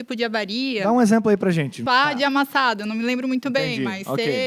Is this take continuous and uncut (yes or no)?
no